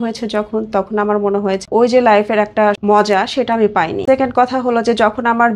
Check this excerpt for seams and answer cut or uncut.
cut